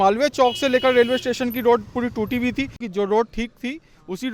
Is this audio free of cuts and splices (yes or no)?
no